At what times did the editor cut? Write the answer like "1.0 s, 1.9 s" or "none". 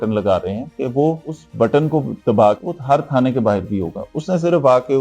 none

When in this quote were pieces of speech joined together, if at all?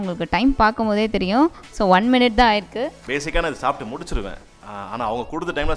3.0 s

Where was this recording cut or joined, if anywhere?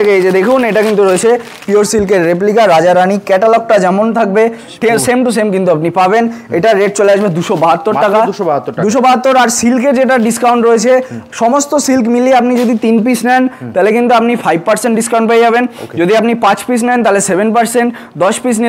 none

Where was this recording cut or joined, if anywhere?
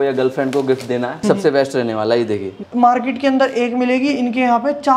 1.2 s, 2.7 s

